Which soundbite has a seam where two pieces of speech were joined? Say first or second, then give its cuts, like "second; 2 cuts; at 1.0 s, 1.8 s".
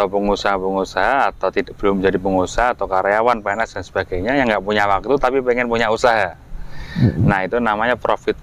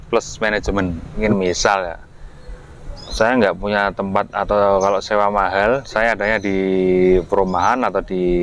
second; 1 cut; at 1.1 s